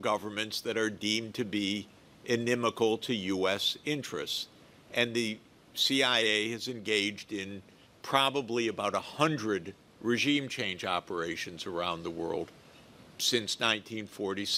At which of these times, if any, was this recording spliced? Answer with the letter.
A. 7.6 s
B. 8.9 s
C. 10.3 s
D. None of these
D